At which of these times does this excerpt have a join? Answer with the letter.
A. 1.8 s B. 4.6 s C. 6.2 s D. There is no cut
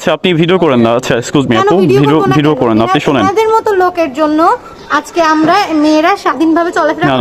D